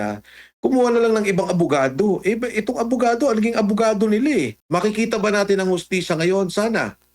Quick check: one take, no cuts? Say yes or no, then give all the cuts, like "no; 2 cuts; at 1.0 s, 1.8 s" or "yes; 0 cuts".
no; 1 cut; at 4.6 s